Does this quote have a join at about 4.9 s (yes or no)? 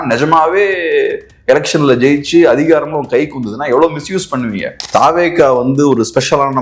yes